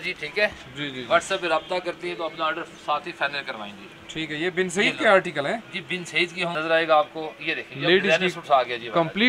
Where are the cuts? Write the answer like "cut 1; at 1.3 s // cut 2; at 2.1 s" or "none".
cut 1; at 6.5 s